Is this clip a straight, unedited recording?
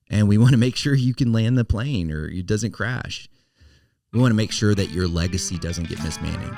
yes; 0 cuts

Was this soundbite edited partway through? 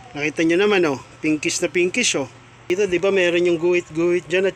yes; 1 cut; at 2.7 s

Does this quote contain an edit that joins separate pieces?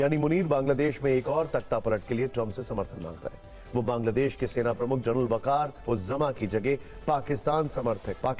no; 0 cuts

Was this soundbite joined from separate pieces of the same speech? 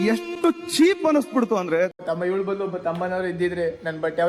yes; 1 cut; at 2.0 s

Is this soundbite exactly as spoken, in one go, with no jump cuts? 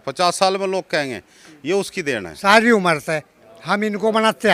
no; 1 cut; at 2.3 s

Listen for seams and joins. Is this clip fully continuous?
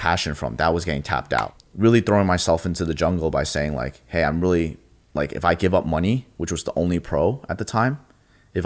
no; 1 cut; at 1.6 s

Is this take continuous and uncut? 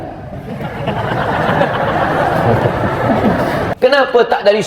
no; 1 cut; at 3.7 s

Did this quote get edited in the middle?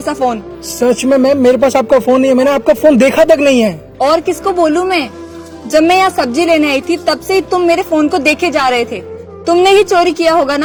no; 0 cuts

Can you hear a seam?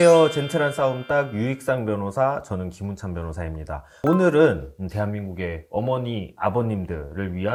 no; 0 cuts

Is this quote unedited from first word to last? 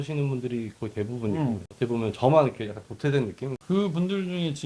no; 2 cuts; at 1.7 s, 3.5 s

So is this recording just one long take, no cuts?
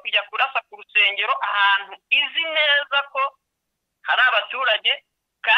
yes; 0 cuts

